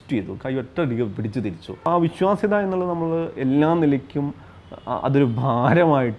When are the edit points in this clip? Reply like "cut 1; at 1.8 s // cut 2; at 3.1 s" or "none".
cut 1; at 1.9 s